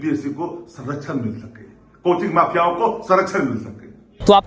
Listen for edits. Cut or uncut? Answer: uncut